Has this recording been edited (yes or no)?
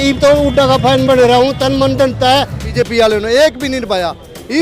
yes